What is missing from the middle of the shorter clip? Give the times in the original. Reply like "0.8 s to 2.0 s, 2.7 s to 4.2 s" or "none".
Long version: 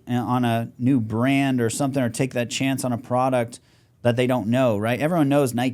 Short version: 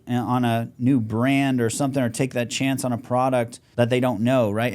3.6 s to 3.9 s